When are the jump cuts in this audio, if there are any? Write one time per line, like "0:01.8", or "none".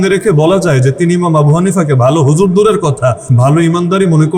0:03.3